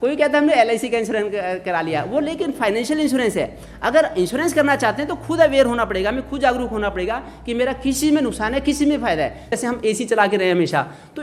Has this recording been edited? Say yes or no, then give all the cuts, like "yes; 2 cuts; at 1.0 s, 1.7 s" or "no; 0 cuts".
yes; 1 cut; at 9.6 s